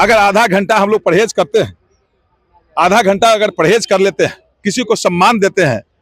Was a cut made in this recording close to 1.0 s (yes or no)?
no